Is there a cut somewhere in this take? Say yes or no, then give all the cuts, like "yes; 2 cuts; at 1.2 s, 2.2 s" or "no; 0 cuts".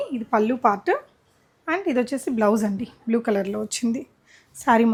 no; 0 cuts